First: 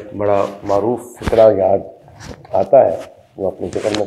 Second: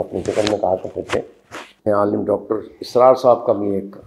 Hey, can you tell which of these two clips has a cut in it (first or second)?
second